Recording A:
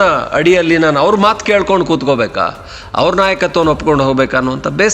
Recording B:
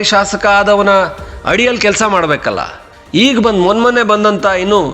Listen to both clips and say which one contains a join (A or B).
B